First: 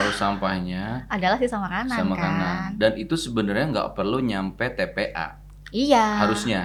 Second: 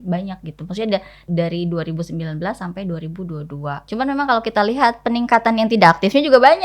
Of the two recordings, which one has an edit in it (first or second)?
second